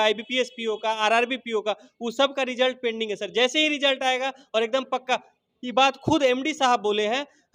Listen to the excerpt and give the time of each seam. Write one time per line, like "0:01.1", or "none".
none